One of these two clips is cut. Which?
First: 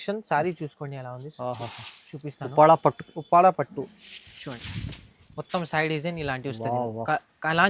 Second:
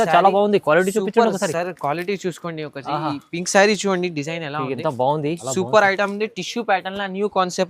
second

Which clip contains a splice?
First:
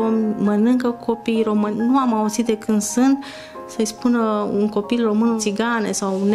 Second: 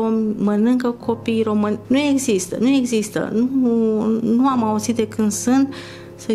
first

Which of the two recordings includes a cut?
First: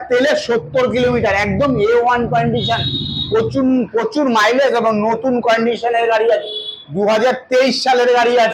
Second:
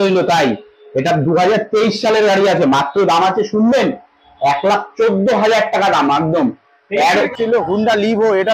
second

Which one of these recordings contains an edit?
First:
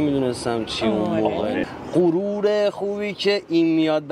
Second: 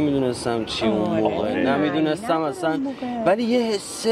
first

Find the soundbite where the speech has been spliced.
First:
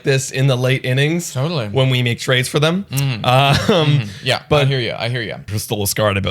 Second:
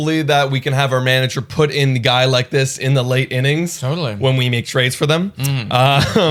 first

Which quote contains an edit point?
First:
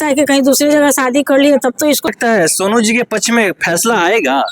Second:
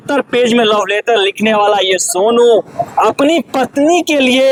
first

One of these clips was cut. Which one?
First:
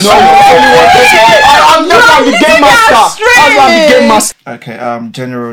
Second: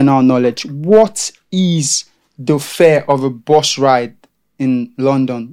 first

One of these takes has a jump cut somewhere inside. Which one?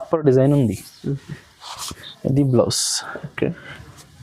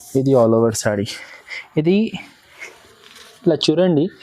first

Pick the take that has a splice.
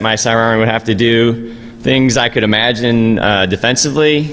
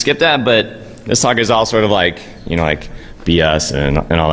second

